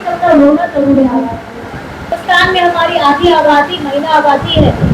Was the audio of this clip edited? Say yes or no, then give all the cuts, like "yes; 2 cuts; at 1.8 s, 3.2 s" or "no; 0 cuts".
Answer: yes; 1 cut; at 2.1 s